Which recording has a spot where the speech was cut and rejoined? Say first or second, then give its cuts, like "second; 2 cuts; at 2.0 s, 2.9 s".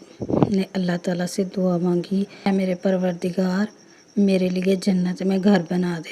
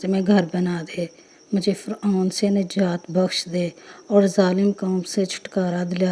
first; 1 cut; at 2.5 s